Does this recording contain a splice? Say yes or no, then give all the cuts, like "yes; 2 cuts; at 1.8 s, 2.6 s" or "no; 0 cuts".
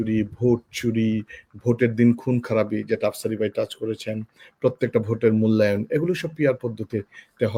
no; 0 cuts